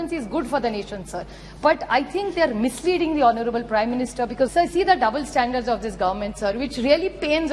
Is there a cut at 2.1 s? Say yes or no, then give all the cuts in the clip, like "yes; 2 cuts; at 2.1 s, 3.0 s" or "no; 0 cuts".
no; 1 cut; at 4.5 s